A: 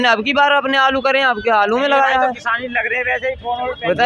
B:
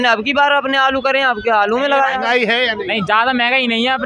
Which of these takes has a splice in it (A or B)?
B